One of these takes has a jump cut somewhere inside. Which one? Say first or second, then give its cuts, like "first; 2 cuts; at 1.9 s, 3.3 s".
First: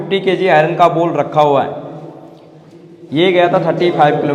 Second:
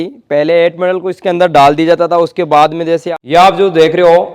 second; 1 cut; at 3.1 s